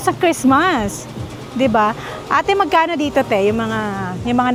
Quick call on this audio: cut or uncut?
uncut